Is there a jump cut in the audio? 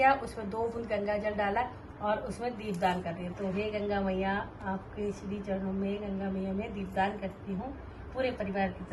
no; 0 cuts

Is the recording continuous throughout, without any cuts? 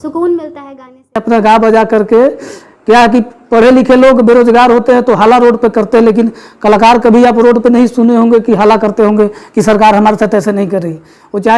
no; 1 cut; at 1.2 s

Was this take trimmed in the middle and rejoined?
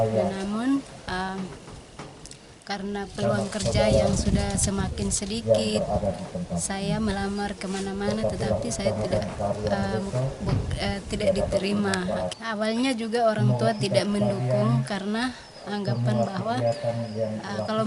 yes; 1 cut; at 12.4 s

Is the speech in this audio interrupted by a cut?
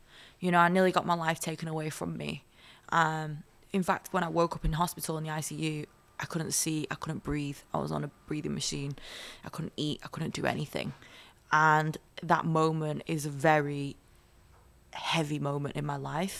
no; 0 cuts

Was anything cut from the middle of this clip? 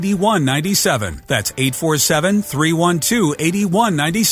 yes; 1 cut; at 1.1 s

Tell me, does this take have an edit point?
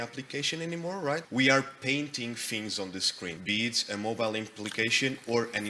yes; 2 cuts; at 1.3 s, 3.4 s

